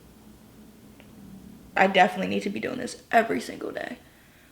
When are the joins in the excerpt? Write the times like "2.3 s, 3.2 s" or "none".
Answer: 1.8 s